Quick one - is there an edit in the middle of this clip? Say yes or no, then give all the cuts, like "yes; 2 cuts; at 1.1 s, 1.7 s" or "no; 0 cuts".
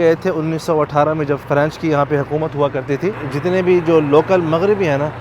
yes; 2 cuts; at 1.4 s, 3.3 s